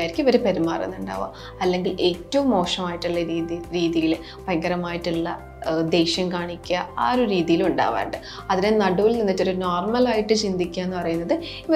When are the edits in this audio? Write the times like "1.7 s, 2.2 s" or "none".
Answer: none

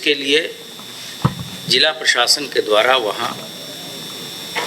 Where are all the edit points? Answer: none

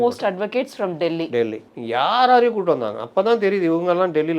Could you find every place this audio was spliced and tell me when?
1.7 s

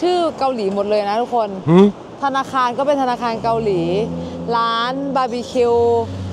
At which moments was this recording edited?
none

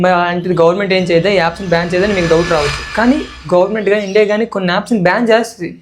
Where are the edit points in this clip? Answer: none

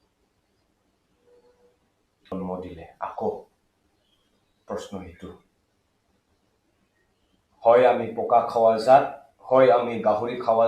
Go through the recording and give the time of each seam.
2.2 s

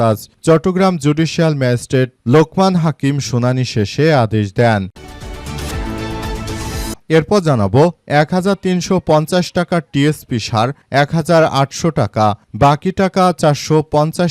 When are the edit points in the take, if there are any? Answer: 4.9 s, 7.0 s

